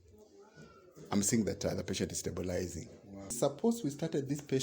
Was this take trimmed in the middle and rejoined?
yes; 1 cut; at 3.4 s

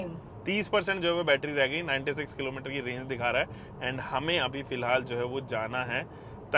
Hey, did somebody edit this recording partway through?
no; 0 cuts

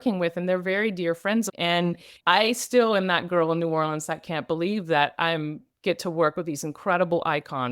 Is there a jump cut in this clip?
yes; 1 cut; at 1.5 s

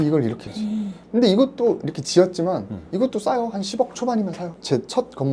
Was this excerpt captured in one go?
yes; 0 cuts

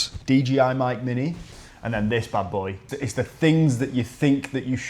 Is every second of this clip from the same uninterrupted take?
no; 2 cuts; at 1.5 s, 2.8 s

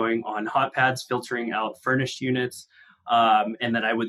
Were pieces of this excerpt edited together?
no; 0 cuts

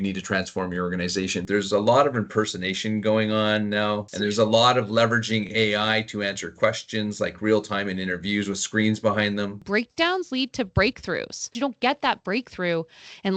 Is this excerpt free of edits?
no; 4 cuts; at 1.4 s, 4.1 s, 9.6 s, 11.5 s

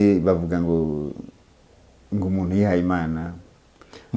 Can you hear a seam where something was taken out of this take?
no; 0 cuts

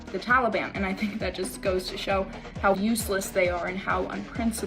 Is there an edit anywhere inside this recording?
yes; 1 cut; at 2.8 s

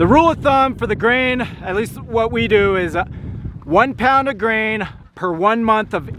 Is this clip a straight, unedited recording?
yes; 0 cuts

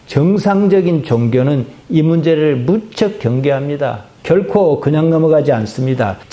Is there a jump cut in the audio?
yes; 1 cut; at 4.1 s

